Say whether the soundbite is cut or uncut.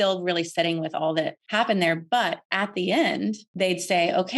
cut